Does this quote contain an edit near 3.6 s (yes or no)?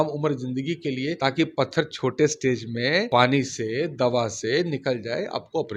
no